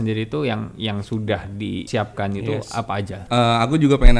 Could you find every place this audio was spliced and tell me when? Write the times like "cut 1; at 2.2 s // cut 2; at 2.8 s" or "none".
cut 1; at 3.1 s